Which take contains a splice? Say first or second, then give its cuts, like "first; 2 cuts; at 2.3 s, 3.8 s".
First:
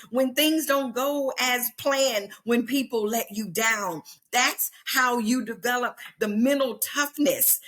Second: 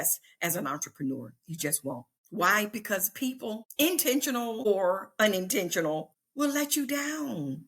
second; 4 cuts; at 2.2 s, 3.7 s, 4.7 s, 6.2 s